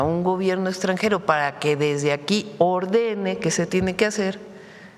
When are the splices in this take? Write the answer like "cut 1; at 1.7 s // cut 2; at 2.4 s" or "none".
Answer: none